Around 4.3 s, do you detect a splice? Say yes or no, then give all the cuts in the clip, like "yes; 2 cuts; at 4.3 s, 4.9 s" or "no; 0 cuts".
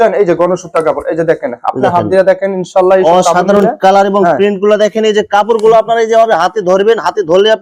no; 0 cuts